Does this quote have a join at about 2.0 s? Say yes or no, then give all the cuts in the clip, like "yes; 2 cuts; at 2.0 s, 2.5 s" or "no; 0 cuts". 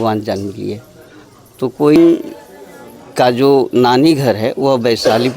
yes; 1 cut; at 2.0 s